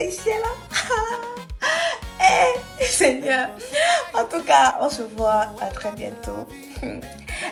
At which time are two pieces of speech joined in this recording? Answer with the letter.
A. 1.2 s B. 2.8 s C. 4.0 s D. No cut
D